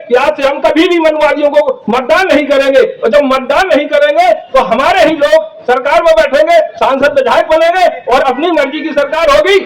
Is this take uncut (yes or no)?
yes